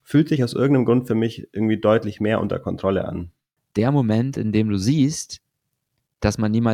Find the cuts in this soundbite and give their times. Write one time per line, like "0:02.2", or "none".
0:03.6